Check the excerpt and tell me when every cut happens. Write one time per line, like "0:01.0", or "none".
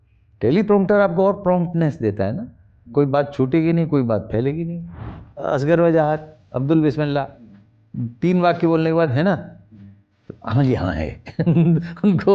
0:05.4

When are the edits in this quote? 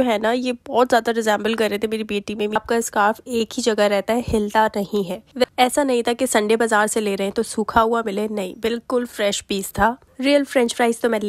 0:02.6
0:05.4
0:10.1

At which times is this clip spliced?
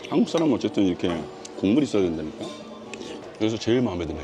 0:03.2

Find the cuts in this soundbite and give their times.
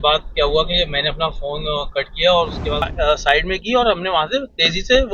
0:02.8

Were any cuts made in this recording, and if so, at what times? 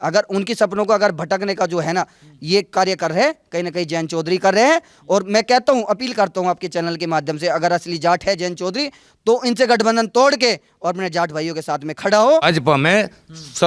0:12.4

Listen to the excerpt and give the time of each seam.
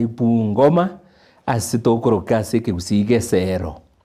0:02.3

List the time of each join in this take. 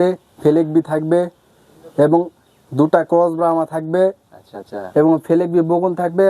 none

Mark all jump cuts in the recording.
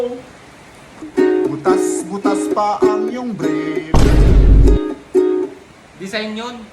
0:01.0

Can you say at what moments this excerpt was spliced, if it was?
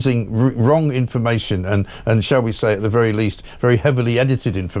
none

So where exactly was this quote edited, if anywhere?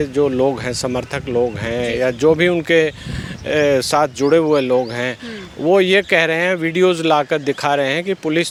none

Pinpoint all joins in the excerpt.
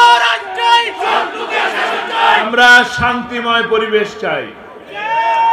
0:02.4

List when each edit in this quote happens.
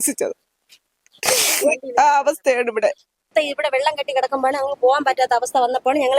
0:03.3

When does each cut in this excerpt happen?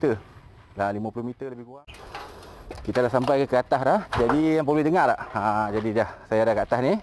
0:01.6

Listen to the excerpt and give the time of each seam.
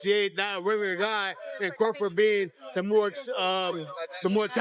none

